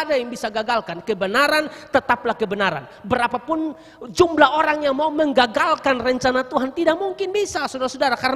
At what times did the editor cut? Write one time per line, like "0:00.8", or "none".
none